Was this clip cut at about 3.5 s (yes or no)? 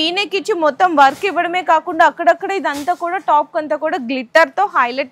no